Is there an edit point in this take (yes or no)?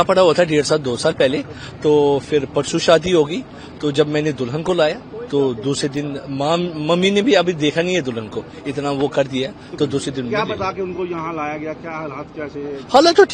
no